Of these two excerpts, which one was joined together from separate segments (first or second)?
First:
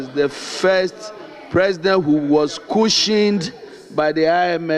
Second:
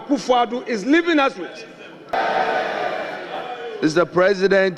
second